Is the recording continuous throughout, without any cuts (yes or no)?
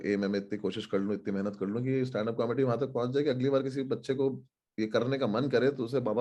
yes